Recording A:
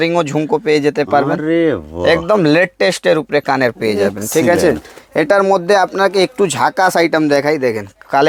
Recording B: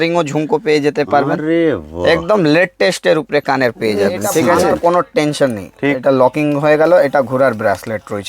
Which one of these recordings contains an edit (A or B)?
B